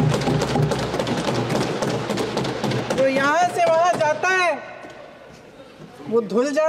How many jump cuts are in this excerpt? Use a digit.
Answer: 0